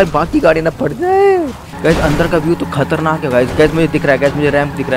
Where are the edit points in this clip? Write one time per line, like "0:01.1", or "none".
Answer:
0:01.6